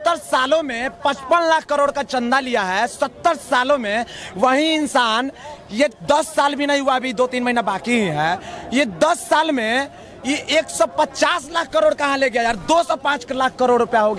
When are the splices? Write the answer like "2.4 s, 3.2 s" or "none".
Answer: none